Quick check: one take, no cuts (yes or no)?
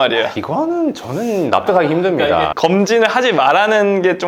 no